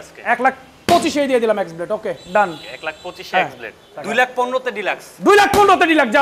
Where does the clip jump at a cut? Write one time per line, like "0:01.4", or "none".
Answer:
0:03.9

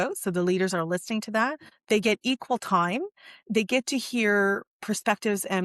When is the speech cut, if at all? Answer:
0:01.7

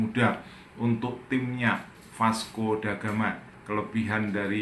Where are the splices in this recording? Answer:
0:03.6

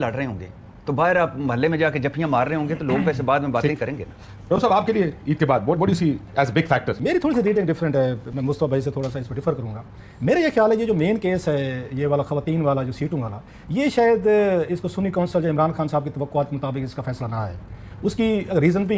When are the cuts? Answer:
none

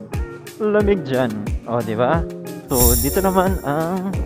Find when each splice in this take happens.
0:02.6

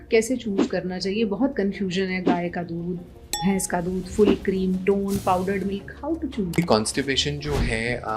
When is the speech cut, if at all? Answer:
0:06.6

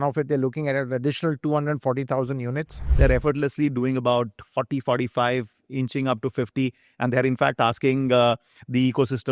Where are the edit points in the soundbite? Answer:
0:02.8

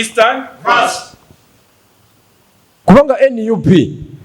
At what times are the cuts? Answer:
0:02.8

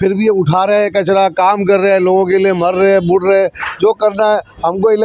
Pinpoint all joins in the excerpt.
none

